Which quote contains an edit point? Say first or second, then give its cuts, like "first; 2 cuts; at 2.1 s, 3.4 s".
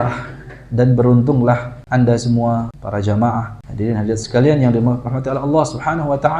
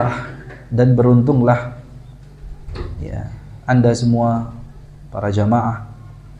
first; 3 cuts; at 1.7 s, 2.8 s, 3.6 s